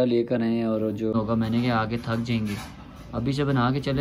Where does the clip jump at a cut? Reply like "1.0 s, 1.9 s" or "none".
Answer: 1.1 s